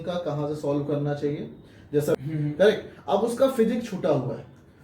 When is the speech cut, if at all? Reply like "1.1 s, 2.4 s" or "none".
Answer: 2.2 s

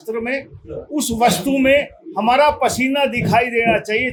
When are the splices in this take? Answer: none

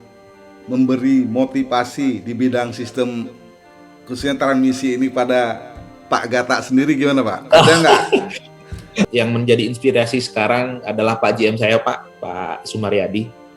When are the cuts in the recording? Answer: 9.1 s

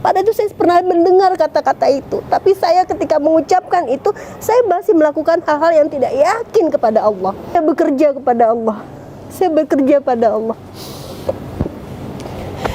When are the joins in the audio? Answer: 7.6 s

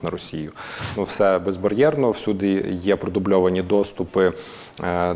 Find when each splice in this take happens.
1.0 s

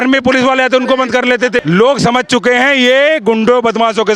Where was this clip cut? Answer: 1.6 s

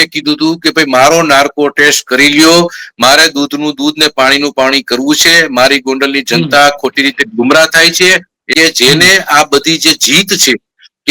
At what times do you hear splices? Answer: 8.3 s

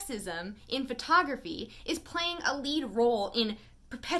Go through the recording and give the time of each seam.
none

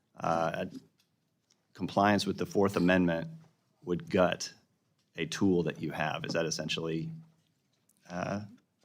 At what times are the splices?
none

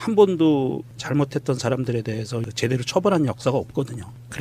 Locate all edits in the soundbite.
none

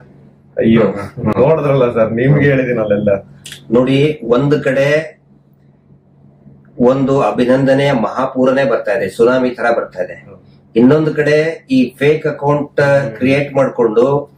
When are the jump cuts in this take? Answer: none

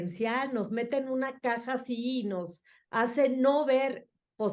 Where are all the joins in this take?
none

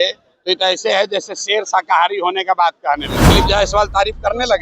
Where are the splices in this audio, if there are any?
3.2 s

